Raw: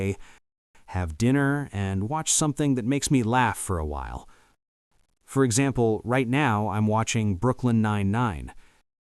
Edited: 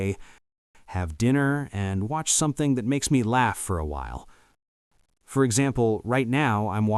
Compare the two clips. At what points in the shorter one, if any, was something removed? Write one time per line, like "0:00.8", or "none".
none